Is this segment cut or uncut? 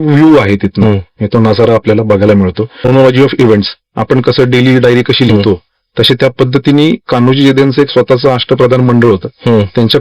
cut